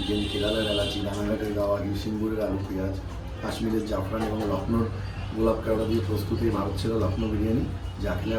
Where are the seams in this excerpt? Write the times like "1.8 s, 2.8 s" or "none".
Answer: none